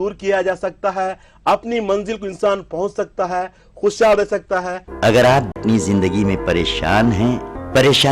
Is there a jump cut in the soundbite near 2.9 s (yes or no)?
no